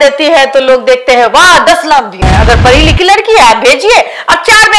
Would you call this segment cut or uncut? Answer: cut